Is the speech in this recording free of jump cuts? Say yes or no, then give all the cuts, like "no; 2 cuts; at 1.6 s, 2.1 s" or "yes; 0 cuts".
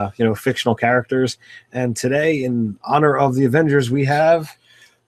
yes; 0 cuts